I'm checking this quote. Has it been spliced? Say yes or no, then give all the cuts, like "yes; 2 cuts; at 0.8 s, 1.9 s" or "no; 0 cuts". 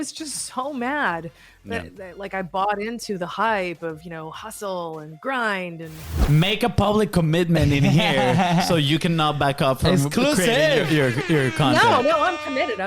yes; 1 cut; at 6.3 s